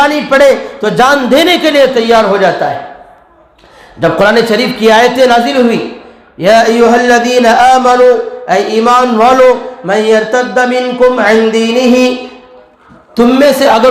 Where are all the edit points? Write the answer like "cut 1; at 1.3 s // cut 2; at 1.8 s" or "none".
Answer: none